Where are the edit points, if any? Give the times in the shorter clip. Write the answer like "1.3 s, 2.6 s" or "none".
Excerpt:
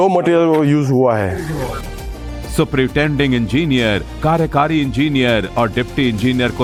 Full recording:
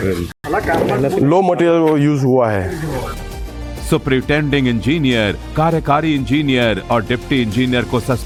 none